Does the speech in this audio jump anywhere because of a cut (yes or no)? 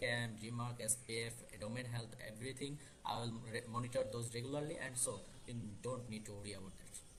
no